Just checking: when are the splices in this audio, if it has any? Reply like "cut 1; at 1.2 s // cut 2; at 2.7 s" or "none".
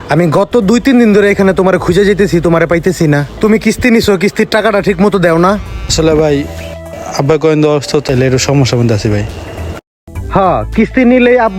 cut 1; at 5.9 s // cut 2; at 8.0 s